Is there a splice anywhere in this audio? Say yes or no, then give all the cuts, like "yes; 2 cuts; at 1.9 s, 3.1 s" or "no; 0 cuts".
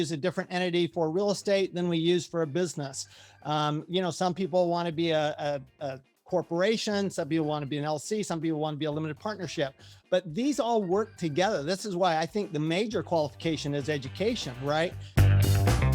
yes; 1 cut; at 15.0 s